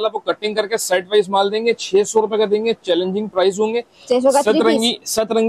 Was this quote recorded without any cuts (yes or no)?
yes